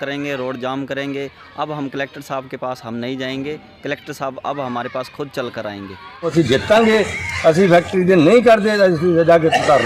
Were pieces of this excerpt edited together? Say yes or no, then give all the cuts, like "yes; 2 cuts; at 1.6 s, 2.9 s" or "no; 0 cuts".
yes; 1 cut; at 6.3 s